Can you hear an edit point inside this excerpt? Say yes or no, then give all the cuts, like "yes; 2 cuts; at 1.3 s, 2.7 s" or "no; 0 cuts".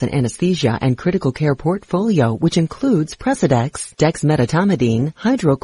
no; 0 cuts